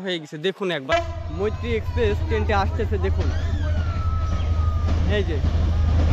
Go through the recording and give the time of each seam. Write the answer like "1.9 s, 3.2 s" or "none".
0.9 s